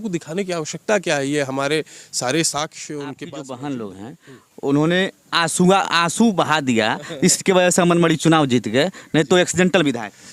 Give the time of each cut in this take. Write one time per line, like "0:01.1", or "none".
0:03.2